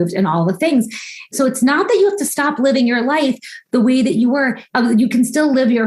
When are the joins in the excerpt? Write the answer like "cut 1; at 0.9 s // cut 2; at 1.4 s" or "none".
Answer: cut 1; at 1.3 s // cut 2; at 4.6 s